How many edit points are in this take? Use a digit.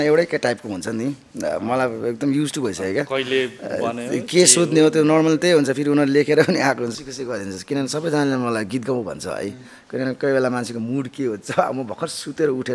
1